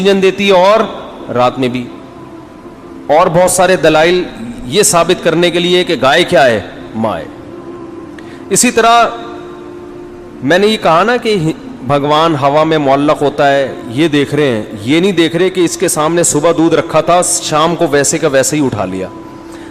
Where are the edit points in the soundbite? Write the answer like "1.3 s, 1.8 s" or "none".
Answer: none